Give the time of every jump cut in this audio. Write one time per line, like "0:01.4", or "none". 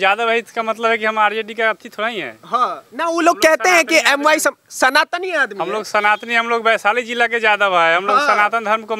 none